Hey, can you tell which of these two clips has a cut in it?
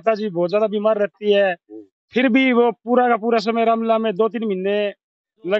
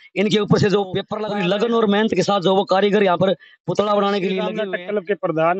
second; 2 cuts; at 1.1 s, 4.6 s

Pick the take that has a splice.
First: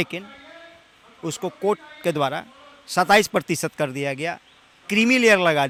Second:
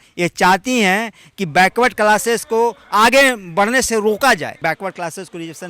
second; 1 cut; at 4.5 s

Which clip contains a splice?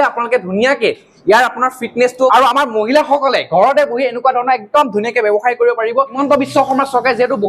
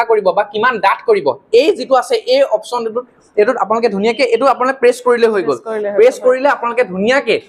first; 2 cuts; at 2.3 s, 6.2 s

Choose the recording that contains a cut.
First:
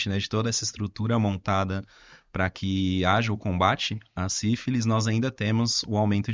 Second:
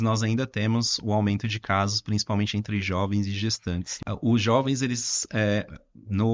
second; 1 cut; at 3.9 s

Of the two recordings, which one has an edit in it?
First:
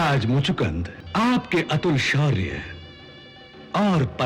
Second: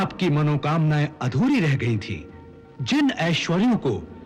first; 1 cut; at 0.9 s

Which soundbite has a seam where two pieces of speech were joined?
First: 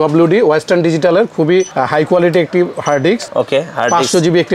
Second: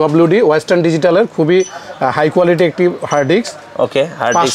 first; 2 cuts; at 1.7 s, 3.3 s

